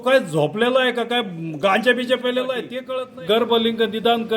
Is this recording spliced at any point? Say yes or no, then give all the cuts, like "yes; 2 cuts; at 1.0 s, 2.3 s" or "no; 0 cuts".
yes; 1 cut; at 2.7 s